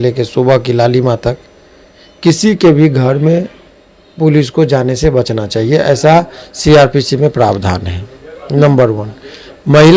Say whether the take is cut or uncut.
uncut